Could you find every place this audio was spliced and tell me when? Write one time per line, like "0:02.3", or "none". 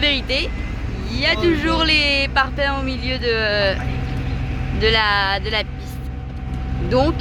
none